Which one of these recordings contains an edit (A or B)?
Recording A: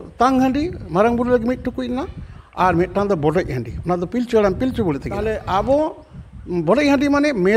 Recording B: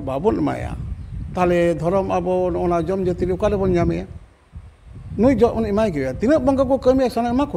A